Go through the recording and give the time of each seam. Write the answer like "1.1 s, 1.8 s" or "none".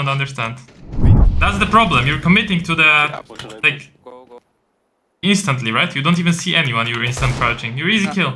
1.3 s

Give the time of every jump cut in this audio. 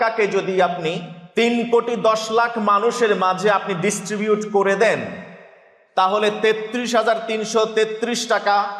1.1 s

